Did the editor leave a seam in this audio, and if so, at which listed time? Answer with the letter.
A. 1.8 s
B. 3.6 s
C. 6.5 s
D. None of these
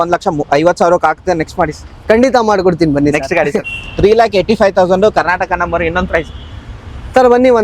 B